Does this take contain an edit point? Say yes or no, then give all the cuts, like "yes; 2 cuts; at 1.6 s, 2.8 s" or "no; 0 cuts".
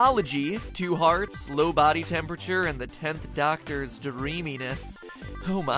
yes; 1 cut; at 2.4 s